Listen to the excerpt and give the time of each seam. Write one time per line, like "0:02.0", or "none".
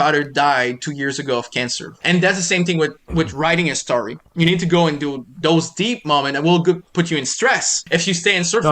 0:01.9
0:07.7